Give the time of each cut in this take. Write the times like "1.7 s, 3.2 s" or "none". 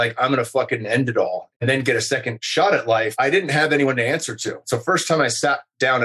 1.4 s, 2.4 s, 3.1 s, 4.7 s